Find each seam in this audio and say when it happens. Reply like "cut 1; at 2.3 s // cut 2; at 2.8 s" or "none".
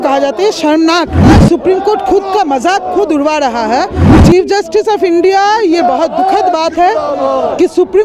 cut 1; at 1.3 s // cut 2; at 4.0 s